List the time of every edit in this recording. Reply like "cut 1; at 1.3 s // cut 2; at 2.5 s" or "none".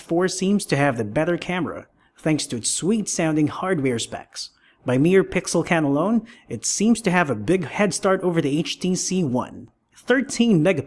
cut 1; at 3.3 s